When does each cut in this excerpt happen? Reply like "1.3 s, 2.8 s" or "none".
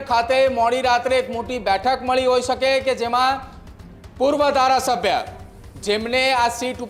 none